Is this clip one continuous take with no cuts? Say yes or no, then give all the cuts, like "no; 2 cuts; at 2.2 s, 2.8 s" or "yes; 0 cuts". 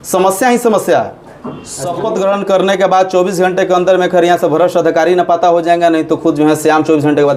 no; 1 cut; at 1.2 s